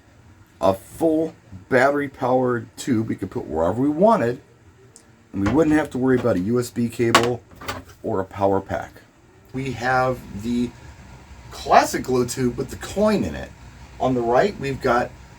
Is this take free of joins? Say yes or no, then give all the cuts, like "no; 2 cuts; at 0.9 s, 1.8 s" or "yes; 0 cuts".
no; 1 cut; at 9.6 s